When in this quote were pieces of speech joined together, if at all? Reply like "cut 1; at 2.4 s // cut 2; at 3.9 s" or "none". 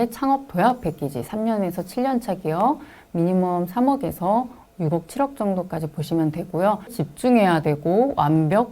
cut 1; at 7.0 s